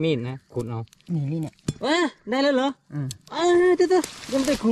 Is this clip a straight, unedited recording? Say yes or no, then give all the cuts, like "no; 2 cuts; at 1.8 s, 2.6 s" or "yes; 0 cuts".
yes; 0 cuts